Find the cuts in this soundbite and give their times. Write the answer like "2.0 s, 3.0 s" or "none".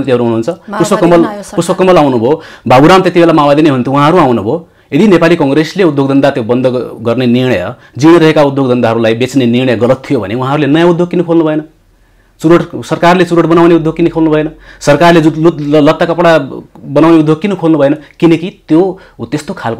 none